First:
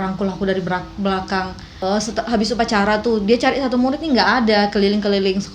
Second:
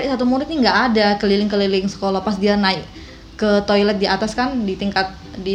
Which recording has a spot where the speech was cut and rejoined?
first; 1 cut; at 1.6 s

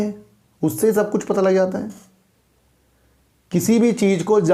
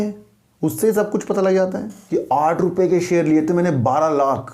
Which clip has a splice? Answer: second; 1 cut; at 1.9 s

